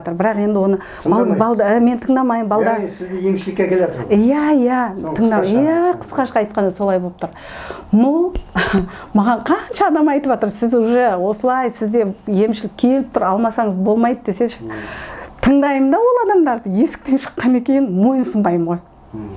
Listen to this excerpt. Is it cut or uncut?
uncut